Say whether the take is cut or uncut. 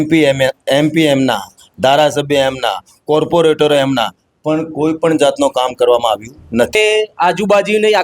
cut